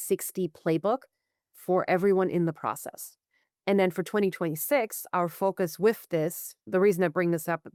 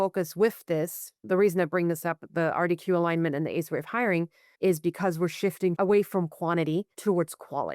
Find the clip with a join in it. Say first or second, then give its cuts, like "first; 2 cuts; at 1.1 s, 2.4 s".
second; 3 cuts; at 4.4 s, 5.8 s, 6.9 s